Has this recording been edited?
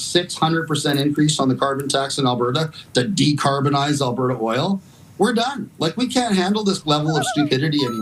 no; 0 cuts

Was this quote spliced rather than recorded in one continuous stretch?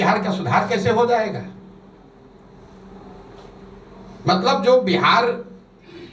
no; 0 cuts

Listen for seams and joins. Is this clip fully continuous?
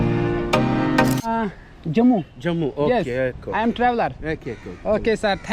no; 1 cut; at 1.2 s

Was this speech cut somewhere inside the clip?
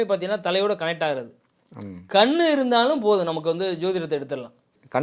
no; 0 cuts

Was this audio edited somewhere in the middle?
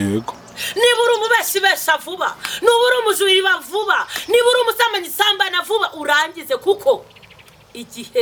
no; 0 cuts

